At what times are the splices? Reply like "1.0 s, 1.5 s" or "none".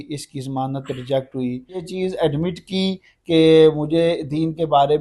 1.9 s